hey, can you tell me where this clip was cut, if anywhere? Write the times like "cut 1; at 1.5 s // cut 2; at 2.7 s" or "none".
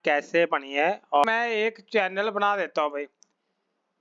cut 1; at 1.2 s